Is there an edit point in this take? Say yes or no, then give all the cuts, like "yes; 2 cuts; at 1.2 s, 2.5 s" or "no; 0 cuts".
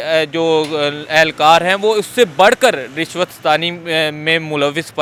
no; 0 cuts